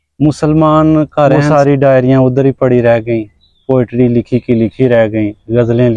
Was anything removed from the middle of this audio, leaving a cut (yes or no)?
yes